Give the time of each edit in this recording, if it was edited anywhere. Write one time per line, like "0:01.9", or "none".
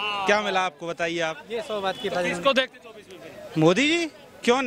none